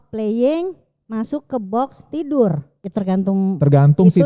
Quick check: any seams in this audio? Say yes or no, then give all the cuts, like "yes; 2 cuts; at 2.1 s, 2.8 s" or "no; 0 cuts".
yes; 1 cut; at 2.8 s